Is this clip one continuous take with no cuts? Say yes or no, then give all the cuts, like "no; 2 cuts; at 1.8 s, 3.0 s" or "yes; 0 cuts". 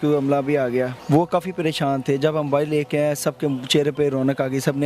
no; 1 cut; at 1.0 s